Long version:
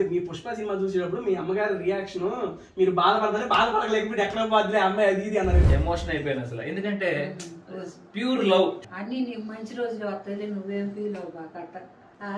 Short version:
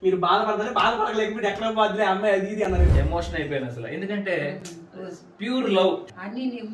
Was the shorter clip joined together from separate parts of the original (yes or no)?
no